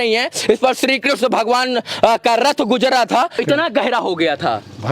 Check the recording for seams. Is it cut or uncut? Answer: cut